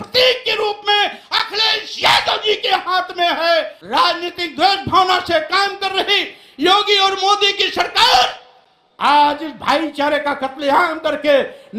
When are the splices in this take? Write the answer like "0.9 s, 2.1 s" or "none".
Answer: 3.8 s